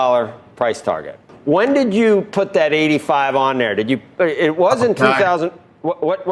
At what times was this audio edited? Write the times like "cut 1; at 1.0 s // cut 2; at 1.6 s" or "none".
cut 1; at 1.3 s